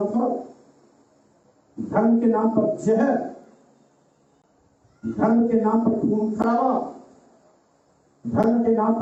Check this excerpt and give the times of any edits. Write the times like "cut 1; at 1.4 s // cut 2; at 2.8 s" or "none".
none